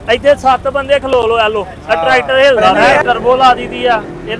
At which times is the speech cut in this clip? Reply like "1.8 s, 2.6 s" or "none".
2.9 s